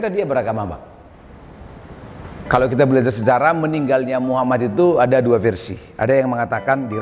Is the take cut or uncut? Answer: cut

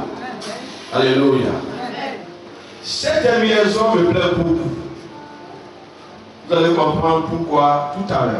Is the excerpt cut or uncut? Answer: uncut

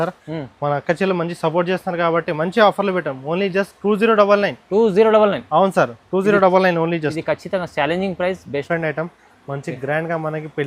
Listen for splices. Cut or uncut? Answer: cut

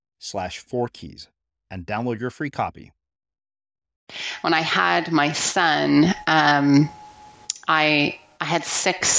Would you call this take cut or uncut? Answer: cut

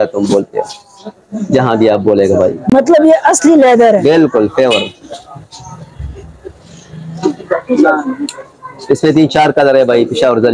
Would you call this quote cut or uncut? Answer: uncut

